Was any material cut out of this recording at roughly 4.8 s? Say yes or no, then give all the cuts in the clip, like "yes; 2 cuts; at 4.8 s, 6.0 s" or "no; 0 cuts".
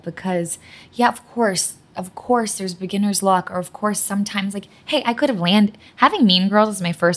no; 0 cuts